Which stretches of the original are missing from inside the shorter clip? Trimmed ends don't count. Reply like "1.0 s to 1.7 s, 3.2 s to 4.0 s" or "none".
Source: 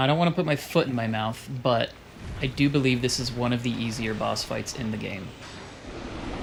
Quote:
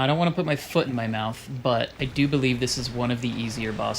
2.0 s to 2.4 s